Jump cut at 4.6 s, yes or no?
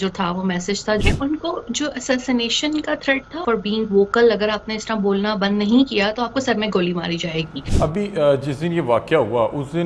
no